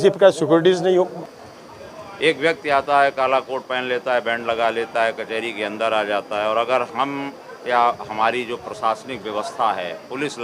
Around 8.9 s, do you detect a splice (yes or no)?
no